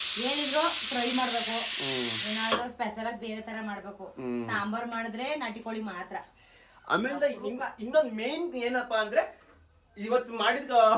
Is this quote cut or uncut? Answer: uncut